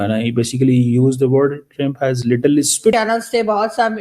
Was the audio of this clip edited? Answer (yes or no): yes